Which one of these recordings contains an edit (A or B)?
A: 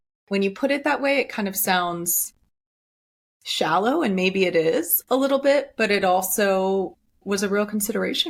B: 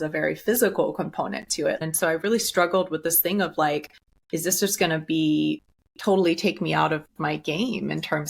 B